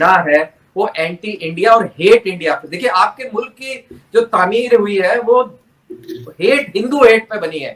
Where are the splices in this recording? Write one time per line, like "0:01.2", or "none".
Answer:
none